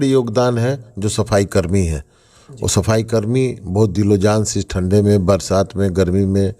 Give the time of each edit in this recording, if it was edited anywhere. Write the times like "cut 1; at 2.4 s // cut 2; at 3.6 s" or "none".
none